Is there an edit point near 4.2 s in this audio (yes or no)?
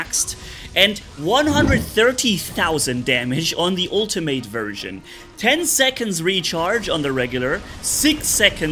no